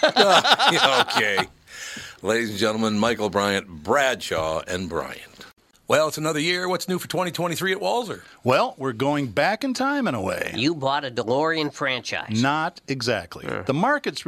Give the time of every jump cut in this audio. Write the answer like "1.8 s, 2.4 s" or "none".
5.6 s